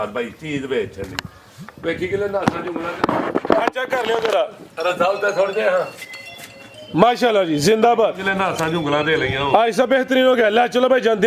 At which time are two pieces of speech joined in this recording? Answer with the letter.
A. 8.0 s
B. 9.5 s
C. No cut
C